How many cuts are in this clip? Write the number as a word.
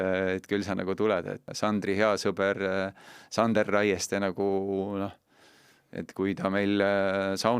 one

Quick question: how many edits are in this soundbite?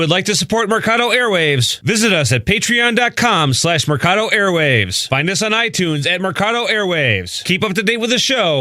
zero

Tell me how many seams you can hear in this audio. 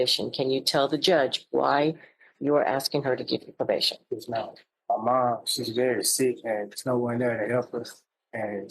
one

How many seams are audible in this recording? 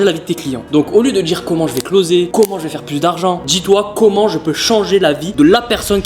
zero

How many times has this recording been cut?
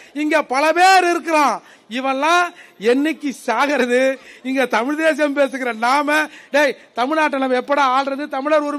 zero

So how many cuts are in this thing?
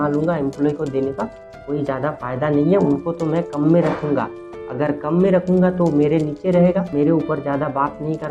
zero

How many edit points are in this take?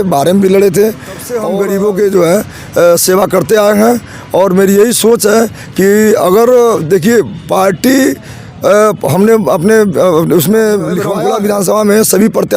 two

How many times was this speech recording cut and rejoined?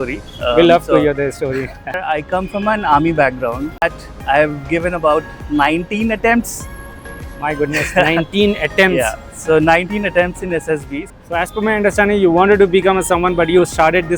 three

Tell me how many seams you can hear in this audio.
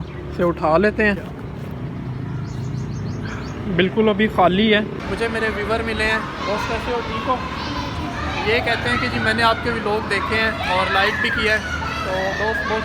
one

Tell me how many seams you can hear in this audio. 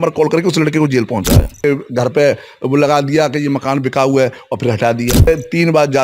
two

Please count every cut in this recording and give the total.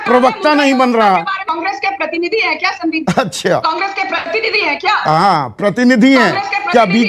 one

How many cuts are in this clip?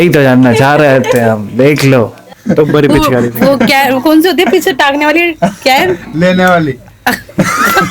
one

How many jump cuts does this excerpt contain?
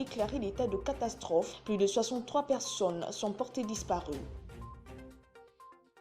one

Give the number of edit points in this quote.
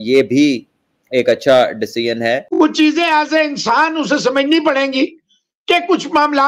one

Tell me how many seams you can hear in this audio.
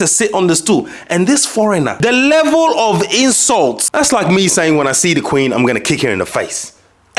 two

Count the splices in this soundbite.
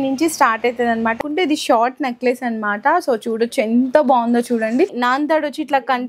two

